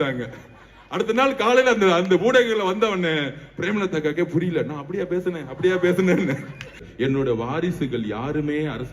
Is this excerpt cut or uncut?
cut